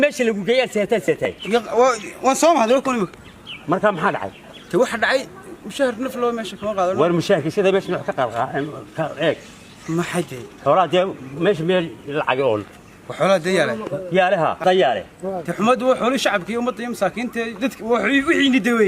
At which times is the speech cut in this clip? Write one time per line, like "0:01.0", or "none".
0:01.1